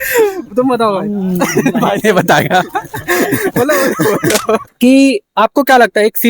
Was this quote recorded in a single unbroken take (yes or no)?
no